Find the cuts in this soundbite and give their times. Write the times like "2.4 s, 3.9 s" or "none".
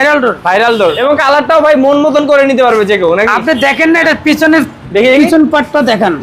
1.0 s